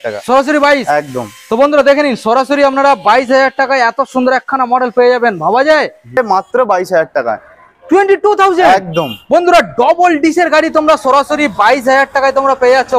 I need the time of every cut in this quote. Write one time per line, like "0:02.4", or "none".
0:06.2